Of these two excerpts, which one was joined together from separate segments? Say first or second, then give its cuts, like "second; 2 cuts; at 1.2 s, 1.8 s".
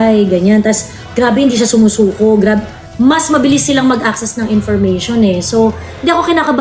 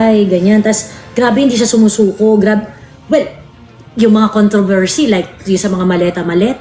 first; 1 cut; at 2.9 s